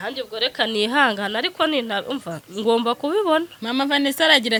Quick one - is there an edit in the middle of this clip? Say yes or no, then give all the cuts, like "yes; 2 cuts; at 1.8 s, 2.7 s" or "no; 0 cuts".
no; 0 cuts